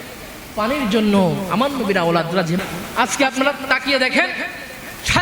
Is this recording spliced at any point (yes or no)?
yes